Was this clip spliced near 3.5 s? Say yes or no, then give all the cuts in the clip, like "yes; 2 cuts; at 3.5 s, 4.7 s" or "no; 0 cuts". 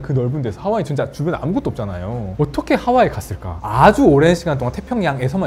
yes; 1 cut; at 3.5 s